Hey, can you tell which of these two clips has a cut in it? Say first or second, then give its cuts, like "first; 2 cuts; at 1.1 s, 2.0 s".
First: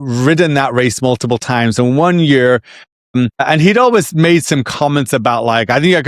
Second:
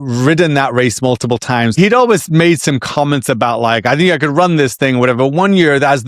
second; 1 cut; at 1.7 s